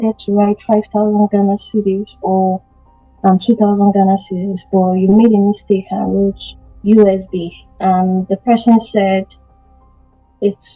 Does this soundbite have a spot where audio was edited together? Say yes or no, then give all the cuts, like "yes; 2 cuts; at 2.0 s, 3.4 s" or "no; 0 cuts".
no; 0 cuts